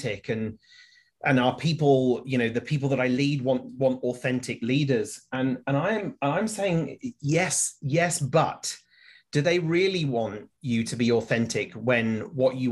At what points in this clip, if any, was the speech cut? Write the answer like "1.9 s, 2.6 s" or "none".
none